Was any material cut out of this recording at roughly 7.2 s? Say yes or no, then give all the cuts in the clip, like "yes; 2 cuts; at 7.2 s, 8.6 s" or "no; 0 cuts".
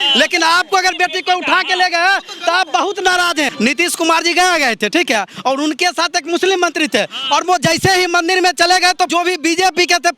no; 2 cuts; at 3.5 s, 9.1 s